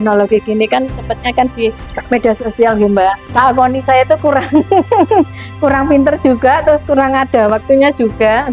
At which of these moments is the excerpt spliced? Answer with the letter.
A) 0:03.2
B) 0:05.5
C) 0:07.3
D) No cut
A